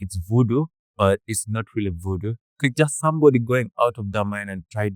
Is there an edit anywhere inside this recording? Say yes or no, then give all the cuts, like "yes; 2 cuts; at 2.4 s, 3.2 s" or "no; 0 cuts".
no; 0 cuts